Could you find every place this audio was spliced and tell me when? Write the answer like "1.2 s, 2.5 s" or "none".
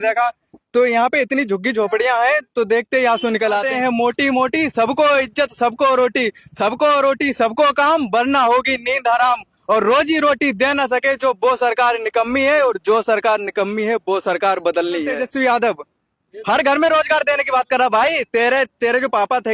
3.7 s, 15.2 s